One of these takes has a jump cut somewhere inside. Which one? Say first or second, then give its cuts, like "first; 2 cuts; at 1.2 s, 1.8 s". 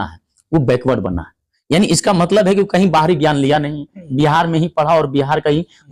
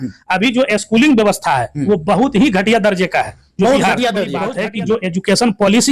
second; 1 cut; at 4.5 s